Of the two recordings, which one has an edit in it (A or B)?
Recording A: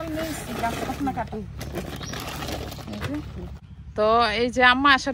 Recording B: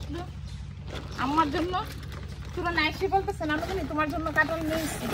A